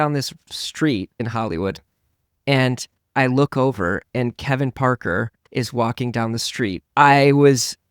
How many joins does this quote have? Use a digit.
2